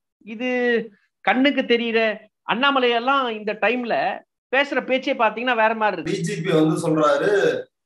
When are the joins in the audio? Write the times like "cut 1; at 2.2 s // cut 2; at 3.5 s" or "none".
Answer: cut 1; at 6.1 s